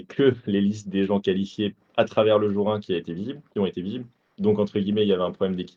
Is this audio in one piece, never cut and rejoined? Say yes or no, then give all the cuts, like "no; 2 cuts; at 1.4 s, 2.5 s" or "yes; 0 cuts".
yes; 0 cuts